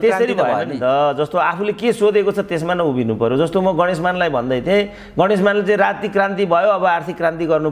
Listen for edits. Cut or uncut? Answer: uncut